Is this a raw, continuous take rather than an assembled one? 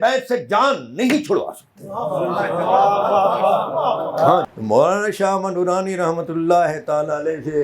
no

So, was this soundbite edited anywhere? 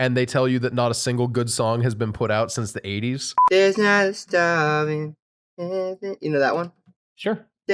yes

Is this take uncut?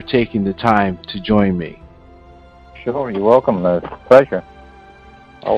no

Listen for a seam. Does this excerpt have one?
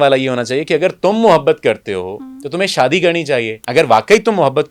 yes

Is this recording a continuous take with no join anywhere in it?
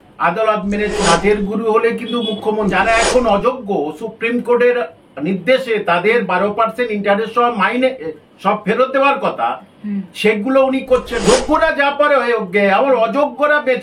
no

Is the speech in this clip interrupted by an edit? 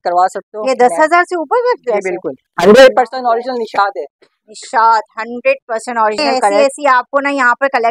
yes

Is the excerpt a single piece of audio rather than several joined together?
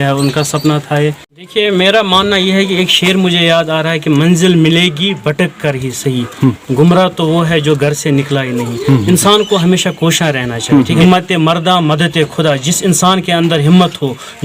no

